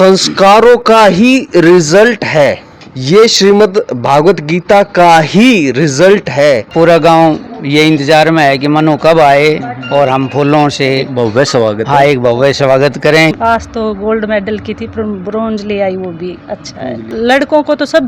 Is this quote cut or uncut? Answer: cut